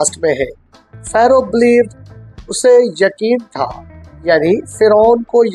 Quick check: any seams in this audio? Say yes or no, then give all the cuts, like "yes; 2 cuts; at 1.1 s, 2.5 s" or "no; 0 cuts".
no; 0 cuts